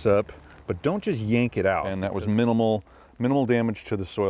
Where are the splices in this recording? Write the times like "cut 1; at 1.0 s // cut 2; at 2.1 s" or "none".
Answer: cut 1; at 1.9 s